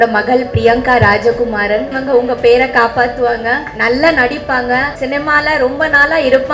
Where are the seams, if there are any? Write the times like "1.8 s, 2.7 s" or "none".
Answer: 2.0 s, 3.7 s, 4.9 s